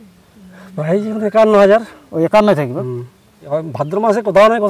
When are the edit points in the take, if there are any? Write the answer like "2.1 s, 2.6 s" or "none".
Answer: 3.4 s